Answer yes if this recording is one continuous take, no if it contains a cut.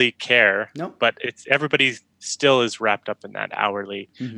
yes